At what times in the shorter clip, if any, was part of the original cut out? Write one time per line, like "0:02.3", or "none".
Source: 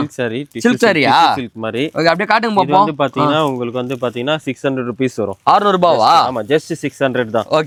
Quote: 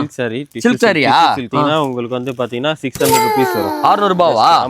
0:01.5